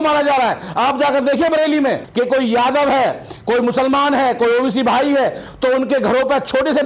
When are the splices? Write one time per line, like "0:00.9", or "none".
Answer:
0:02.0